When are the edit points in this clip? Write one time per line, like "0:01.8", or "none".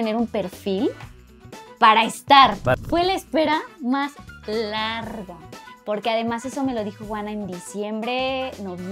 0:02.8